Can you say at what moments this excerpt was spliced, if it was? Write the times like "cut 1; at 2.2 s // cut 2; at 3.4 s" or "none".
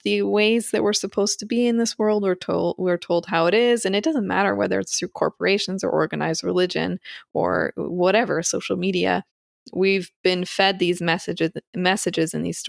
none